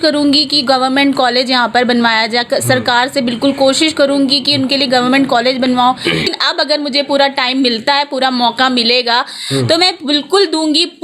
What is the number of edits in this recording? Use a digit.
1